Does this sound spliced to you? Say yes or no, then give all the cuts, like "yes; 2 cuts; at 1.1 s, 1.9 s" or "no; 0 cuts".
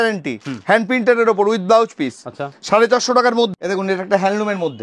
yes; 1 cut; at 3.5 s